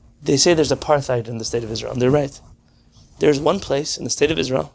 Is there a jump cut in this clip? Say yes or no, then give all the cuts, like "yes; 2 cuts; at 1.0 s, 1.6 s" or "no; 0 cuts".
no; 0 cuts